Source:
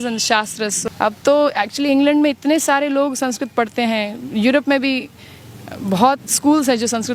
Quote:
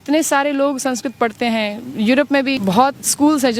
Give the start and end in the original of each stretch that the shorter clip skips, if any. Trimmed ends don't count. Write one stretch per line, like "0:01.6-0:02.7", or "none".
0:05.0-0:05.8